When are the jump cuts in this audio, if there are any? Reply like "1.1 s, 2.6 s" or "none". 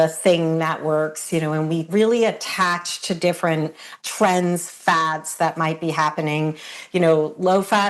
1.9 s, 3.9 s, 6.7 s